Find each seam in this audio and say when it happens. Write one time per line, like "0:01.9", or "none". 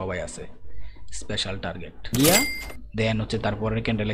0:02.1

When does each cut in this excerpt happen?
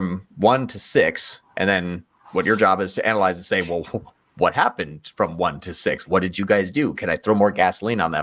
none

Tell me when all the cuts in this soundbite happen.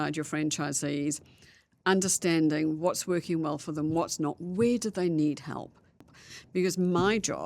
0:06.0

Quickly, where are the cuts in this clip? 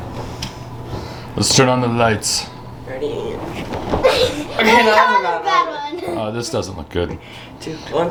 none

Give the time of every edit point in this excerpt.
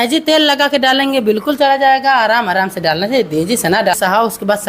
none

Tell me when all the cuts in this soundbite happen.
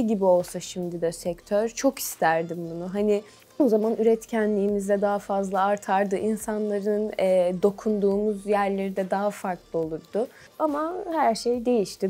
none

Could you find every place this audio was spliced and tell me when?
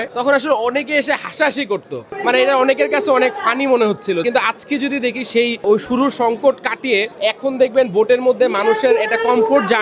0:02.1
0:07.1

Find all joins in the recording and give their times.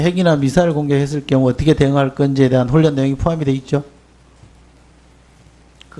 none

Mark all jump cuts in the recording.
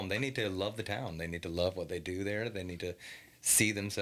none

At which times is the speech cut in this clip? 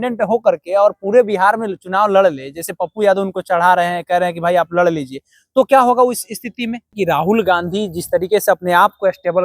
0:06.9

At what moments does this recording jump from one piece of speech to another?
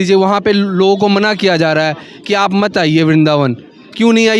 none

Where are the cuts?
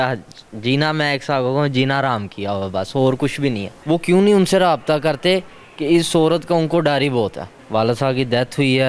0:03.7
0:07.6

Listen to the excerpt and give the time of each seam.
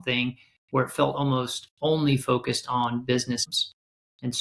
0:03.5

